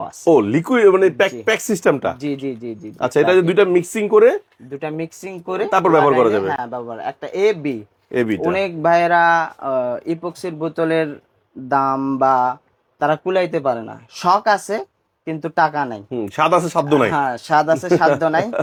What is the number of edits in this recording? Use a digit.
0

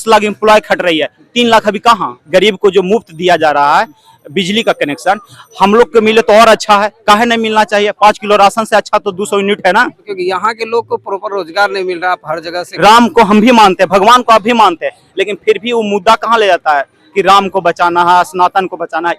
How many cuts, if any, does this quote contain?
3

